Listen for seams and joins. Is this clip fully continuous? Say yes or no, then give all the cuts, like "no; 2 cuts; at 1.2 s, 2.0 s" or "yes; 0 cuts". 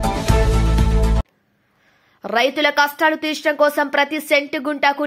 yes; 0 cuts